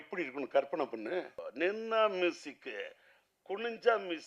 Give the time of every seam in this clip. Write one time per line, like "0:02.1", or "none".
0:01.4

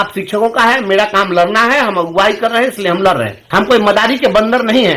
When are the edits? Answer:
0:03.4

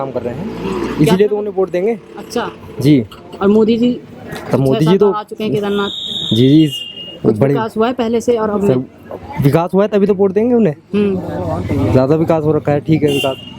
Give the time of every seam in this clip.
none

